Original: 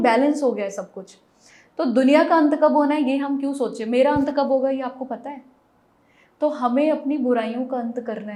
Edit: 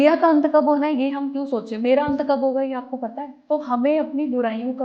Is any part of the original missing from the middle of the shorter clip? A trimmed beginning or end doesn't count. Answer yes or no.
yes